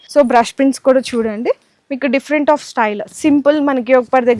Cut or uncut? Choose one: uncut